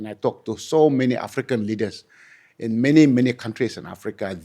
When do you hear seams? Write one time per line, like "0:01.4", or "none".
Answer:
none